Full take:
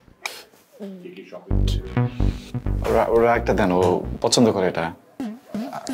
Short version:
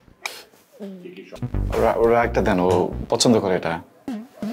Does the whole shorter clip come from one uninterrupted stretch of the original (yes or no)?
no